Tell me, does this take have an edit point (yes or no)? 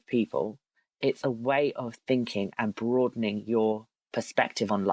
no